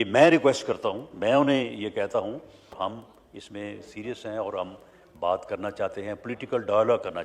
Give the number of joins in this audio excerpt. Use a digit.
1